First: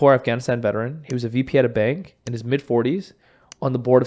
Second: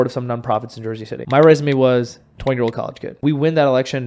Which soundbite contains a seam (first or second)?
second